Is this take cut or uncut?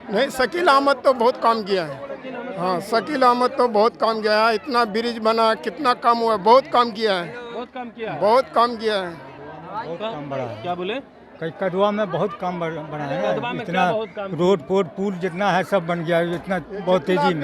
uncut